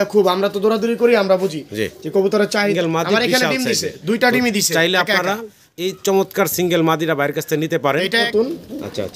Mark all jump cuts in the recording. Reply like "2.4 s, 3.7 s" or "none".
2.7 s, 8.3 s